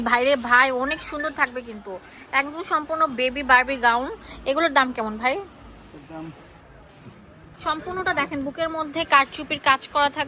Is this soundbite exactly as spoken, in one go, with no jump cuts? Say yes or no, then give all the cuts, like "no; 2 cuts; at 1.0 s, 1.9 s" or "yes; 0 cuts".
yes; 0 cuts